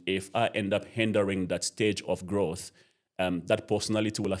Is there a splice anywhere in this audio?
no; 0 cuts

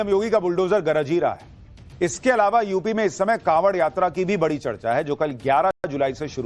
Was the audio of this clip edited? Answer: no; 0 cuts

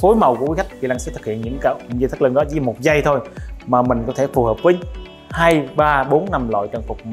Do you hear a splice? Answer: no; 0 cuts

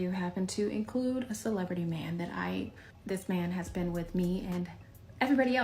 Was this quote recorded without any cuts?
no; 1 cut; at 2.9 s

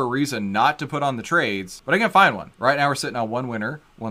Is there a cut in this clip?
yes; 2 cuts; at 1.7 s, 2.5 s

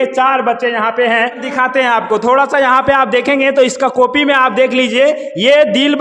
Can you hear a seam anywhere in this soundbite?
yes; 1 cut; at 1.4 s

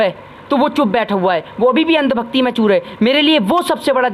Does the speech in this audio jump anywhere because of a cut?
no; 0 cuts

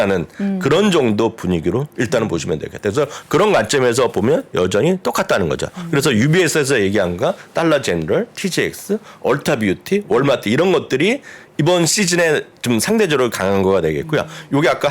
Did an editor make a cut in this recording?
no; 0 cuts

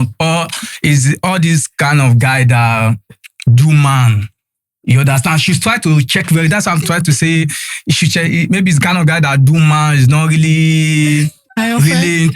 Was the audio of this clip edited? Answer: yes; 1 cut; at 11.4 s

